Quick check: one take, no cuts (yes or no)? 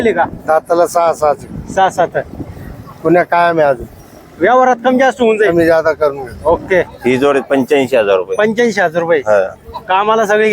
no